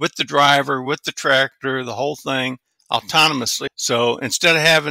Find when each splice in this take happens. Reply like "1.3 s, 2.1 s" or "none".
3.6 s